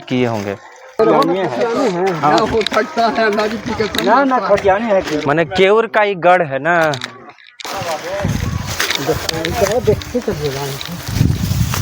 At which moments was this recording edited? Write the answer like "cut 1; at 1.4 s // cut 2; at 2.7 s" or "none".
cut 1; at 1.0 s // cut 2; at 7.5 s